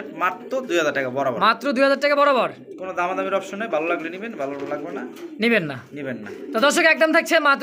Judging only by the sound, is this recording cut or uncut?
uncut